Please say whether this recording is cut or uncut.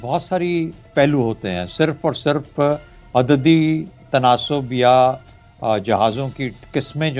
uncut